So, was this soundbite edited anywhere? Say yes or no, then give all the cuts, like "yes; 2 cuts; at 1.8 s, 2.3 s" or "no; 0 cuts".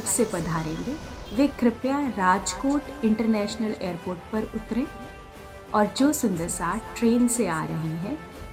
no; 0 cuts